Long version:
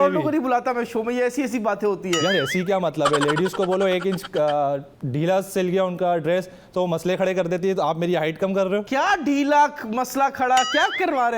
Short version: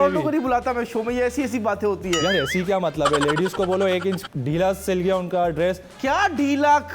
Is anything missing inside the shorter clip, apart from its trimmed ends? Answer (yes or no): yes